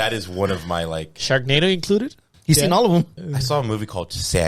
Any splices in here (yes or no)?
yes